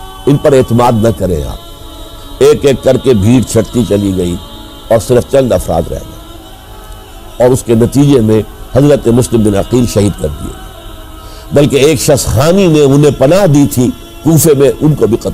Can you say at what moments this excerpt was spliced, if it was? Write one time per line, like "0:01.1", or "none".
0:02.2